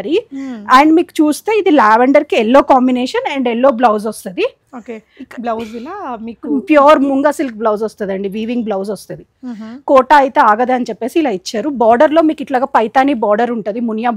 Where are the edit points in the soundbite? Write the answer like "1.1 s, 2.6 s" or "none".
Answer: none